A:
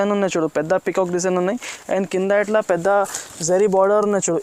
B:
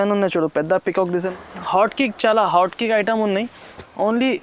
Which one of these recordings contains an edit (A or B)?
B